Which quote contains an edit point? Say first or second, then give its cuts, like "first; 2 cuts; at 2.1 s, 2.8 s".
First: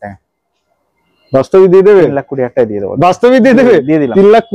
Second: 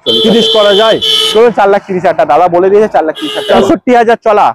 second; 1 cut; at 3.6 s